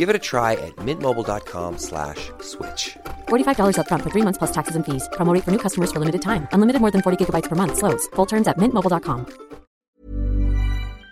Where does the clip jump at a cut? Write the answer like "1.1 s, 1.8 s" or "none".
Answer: 9.7 s

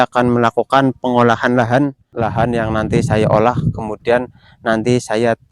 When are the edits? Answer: 2.0 s

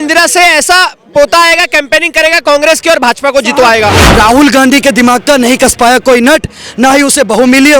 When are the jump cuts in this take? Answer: 4.0 s

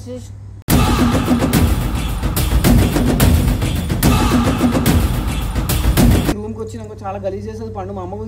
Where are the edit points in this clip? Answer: 6.4 s

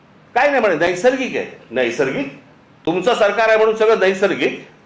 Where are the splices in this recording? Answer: 2.9 s

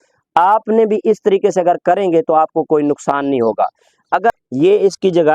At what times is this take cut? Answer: 4.3 s

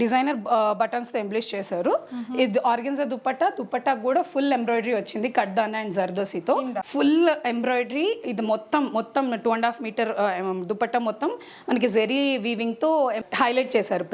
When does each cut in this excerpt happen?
6.8 s

